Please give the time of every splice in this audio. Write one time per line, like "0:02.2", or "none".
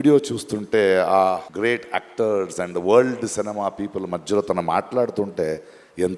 0:01.5